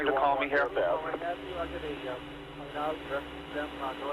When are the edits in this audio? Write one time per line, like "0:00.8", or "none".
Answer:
none

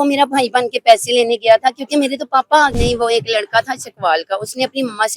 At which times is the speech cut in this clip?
0:02.8

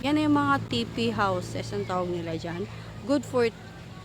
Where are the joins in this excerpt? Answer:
none

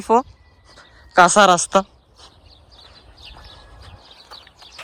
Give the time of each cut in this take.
none

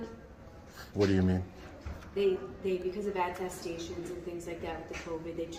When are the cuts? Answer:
none

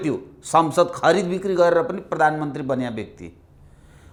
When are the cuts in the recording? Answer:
none

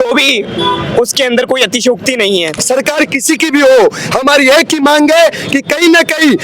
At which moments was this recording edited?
0:02.5

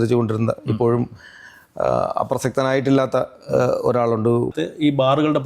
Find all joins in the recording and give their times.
0:04.5

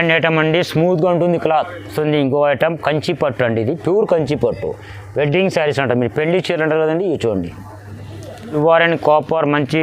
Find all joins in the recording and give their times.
0:01.8
0:08.5

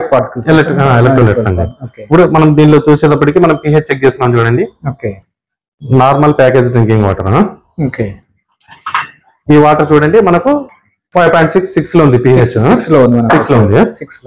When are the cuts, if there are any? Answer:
none

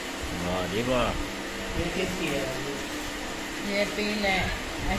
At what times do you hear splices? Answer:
none

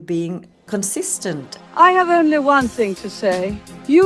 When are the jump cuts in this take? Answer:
0:01.5

